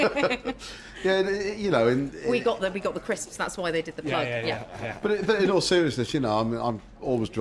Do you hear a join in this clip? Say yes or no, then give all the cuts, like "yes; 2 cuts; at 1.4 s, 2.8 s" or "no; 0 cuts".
no; 0 cuts